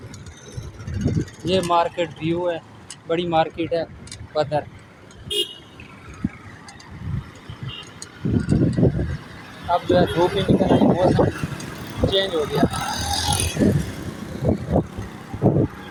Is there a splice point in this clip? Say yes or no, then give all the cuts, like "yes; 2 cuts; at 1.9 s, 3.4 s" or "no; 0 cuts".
no; 0 cuts